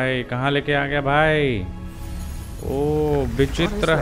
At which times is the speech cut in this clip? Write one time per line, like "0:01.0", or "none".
none